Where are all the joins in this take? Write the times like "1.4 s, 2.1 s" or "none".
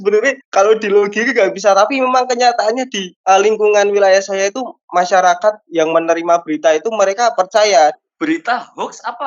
8.0 s